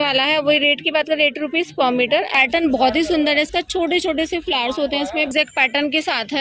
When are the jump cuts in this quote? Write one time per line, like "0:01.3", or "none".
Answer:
0:02.3
0:05.3